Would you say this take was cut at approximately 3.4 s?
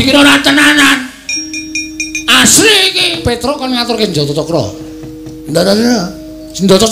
yes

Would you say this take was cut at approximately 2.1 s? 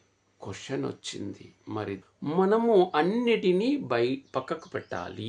yes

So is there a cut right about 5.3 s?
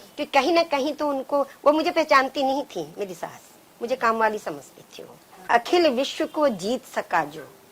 yes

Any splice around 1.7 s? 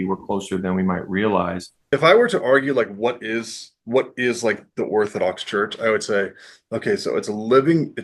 yes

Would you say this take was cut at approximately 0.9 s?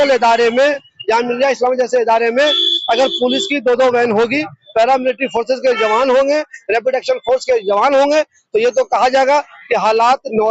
yes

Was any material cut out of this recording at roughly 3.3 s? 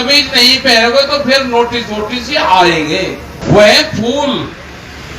yes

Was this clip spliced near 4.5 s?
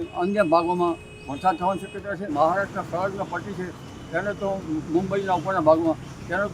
no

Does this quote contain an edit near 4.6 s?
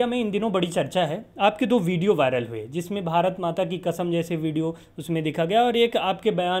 no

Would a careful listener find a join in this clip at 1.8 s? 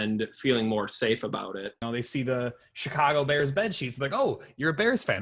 yes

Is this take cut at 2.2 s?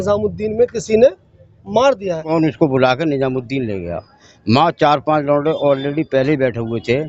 yes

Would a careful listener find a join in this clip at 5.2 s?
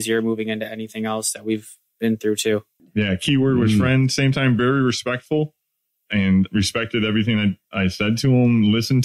no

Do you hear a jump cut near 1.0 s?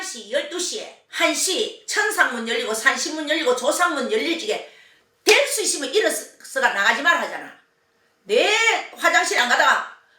yes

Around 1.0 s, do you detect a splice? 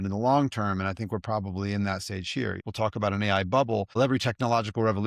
no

